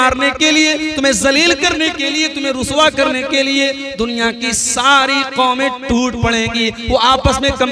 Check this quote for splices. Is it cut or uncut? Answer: uncut